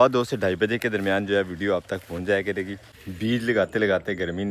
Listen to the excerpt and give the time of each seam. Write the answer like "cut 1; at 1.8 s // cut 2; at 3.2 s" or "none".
cut 1; at 2.9 s